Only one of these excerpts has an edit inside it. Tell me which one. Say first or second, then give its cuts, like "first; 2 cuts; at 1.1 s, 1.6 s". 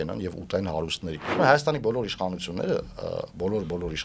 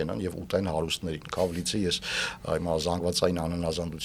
first; 1 cut; at 1.2 s